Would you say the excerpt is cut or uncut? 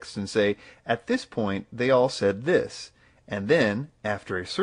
uncut